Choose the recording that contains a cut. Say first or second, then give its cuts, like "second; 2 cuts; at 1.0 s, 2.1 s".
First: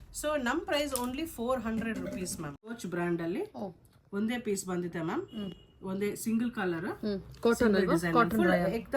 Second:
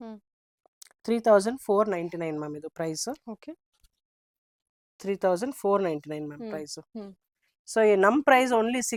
first; 1 cut; at 2.7 s